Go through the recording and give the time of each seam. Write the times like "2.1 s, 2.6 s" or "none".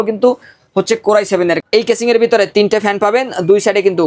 1.6 s